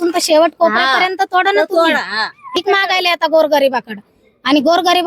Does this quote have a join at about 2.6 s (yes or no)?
yes